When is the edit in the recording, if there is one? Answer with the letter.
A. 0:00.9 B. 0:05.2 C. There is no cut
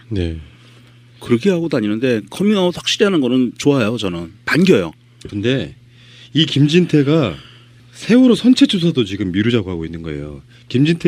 C